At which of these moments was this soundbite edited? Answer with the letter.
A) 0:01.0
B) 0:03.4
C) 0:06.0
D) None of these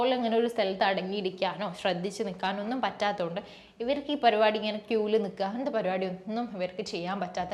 D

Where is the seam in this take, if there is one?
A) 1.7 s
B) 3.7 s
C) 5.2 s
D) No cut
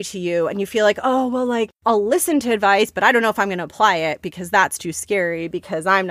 A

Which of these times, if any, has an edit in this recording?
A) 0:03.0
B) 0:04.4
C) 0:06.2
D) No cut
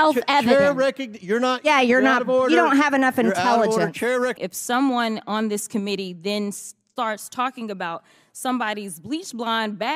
B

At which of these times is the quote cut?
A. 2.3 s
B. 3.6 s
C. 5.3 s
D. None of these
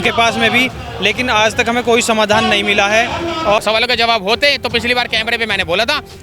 B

